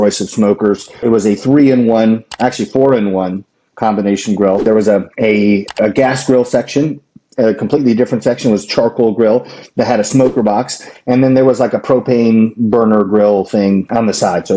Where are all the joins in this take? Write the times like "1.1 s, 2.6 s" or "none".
1.0 s, 4.7 s